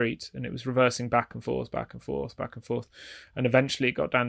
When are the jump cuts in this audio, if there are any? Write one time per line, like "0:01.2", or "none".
none